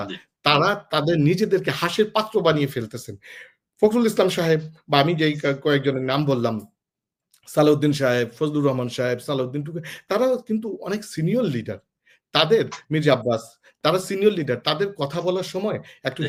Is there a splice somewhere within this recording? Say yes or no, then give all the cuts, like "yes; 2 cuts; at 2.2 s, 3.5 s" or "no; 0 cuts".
no; 0 cuts